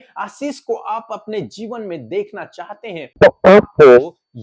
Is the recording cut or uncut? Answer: cut